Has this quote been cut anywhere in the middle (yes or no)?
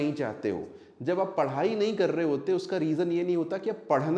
no